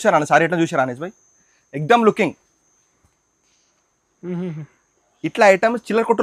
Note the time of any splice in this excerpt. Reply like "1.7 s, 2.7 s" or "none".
none